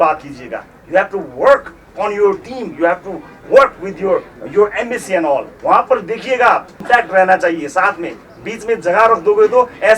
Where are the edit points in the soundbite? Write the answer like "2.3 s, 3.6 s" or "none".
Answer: 6.7 s

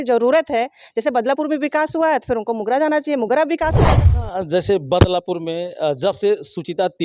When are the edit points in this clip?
3.8 s

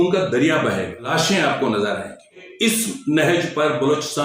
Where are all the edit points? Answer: 1.1 s, 2.5 s

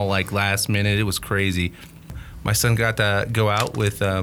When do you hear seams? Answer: 2.2 s

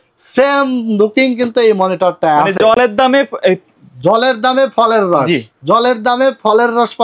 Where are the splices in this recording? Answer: none

